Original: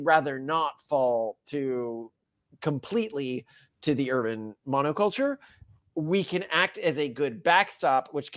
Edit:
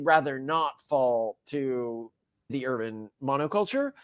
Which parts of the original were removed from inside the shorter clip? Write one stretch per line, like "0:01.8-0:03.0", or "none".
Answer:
0:02.5-0:04.0

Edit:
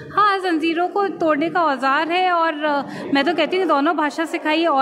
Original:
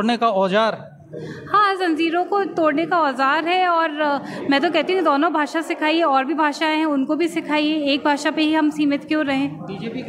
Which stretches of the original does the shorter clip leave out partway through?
none

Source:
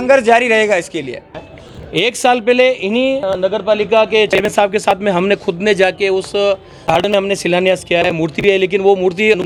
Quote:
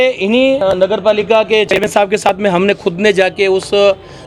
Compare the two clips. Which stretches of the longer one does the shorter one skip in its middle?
none

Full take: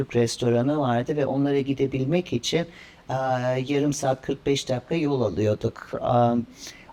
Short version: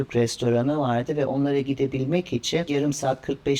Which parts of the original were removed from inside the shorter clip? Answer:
0:02.7-0:03.7

